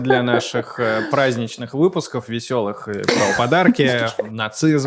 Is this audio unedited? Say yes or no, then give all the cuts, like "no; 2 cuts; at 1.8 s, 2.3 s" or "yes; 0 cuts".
yes; 0 cuts